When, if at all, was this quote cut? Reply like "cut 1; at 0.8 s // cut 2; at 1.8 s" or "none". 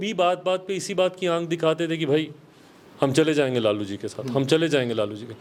none